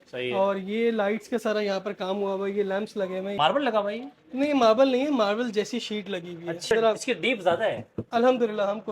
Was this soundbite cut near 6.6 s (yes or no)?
yes